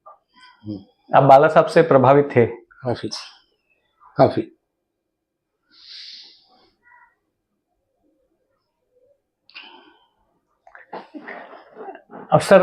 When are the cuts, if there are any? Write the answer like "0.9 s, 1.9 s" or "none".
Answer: none